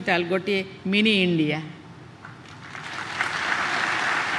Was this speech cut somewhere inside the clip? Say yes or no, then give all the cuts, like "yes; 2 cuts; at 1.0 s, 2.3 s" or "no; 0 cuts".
no; 0 cuts